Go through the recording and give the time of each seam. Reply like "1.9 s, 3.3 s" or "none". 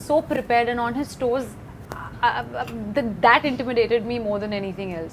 none